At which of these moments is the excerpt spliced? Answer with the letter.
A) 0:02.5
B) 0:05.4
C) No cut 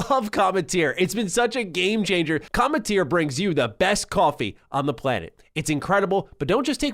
A